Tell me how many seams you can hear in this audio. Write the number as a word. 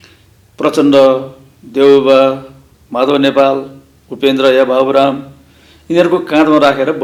zero